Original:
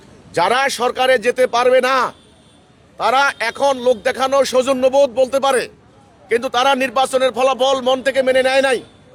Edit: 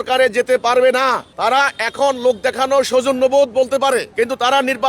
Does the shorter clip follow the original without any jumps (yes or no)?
no